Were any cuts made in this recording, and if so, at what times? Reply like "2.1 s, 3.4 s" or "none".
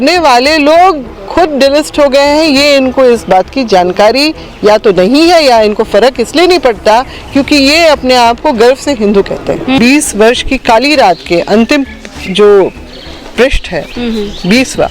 9.8 s